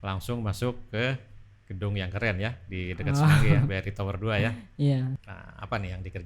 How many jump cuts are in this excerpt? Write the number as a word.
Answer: one